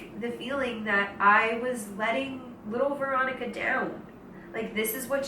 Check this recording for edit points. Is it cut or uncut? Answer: uncut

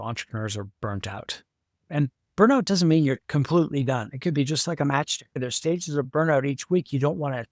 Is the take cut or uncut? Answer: cut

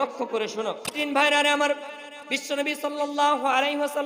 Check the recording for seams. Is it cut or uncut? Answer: cut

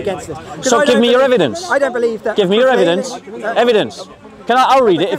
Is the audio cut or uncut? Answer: uncut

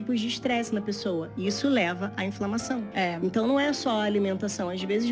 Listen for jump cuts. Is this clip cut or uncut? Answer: uncut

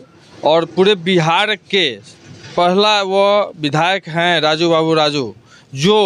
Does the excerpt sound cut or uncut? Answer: uncut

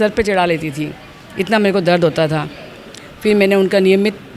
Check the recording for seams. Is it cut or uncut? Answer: uncut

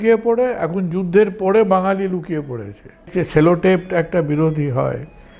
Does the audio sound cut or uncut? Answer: cut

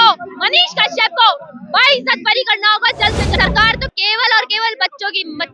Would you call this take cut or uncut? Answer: cut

